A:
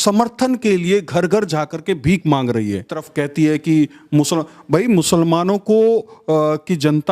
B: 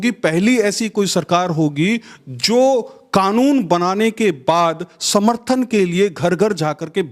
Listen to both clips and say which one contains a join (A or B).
A